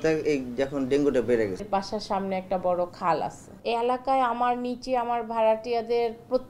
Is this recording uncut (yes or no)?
no